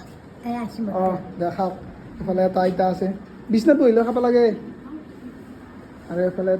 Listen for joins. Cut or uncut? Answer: uncut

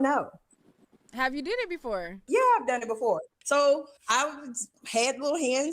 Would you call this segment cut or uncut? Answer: cut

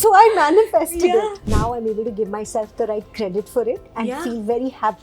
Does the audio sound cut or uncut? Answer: cut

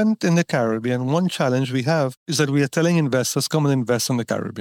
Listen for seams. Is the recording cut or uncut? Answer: uncut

